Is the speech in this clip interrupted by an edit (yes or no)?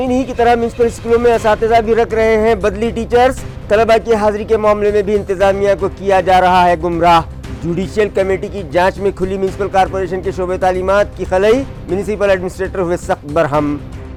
no